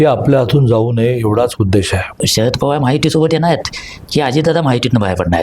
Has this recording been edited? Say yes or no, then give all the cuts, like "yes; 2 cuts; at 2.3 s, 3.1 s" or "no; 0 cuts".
yes; 1 cut; at 2.2 s